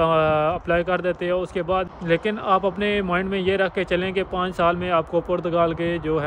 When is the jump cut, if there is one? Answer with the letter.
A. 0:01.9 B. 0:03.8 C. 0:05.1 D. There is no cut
A